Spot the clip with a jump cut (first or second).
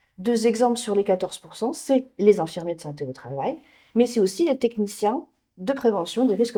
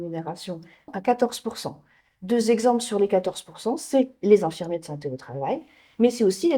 second